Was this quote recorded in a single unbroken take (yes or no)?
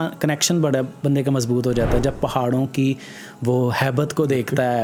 yes